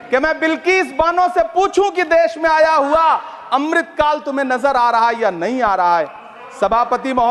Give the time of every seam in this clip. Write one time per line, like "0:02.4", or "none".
none